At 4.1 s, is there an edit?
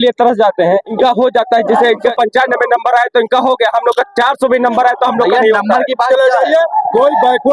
no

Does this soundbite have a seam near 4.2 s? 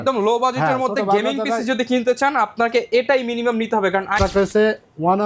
yes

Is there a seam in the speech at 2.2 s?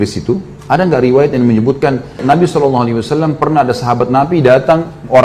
yes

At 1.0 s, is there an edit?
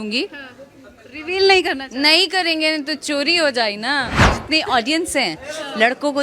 no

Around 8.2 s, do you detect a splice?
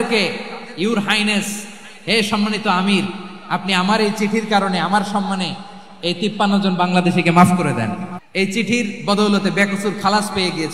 yes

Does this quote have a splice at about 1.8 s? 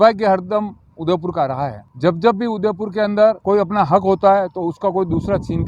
yes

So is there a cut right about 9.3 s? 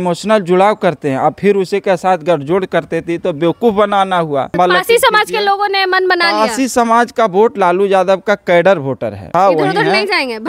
yes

